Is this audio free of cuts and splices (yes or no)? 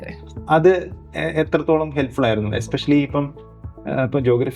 yes